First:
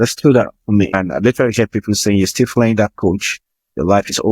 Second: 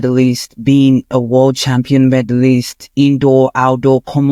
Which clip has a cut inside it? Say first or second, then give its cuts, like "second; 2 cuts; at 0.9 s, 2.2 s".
first; 1 cut; at 0.9 s